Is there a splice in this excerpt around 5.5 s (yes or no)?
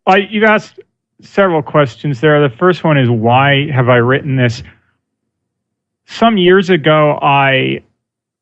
yes